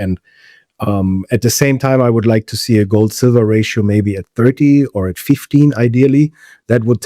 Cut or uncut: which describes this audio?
uncut